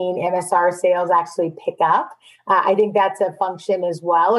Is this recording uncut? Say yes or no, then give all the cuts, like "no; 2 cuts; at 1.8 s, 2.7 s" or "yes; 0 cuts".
yes; 0 cuts